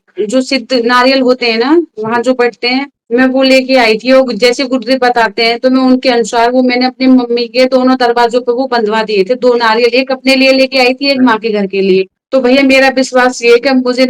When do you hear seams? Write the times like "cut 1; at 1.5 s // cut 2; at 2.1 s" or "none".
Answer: none